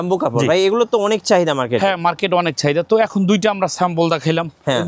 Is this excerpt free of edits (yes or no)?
yes